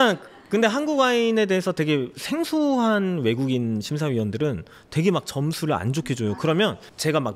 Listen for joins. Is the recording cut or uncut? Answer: uncut